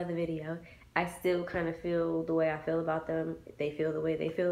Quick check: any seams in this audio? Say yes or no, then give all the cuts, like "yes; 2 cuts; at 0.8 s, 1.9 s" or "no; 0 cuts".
no; 0 cuts